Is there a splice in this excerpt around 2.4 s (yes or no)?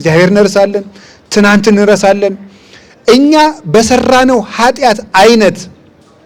no